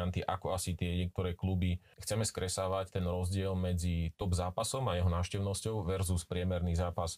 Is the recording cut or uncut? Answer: cut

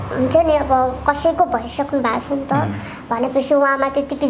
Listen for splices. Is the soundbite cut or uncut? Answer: uncut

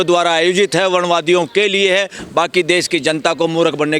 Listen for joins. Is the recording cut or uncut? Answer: uncut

